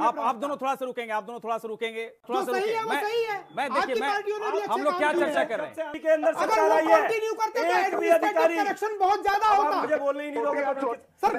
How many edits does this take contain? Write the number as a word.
two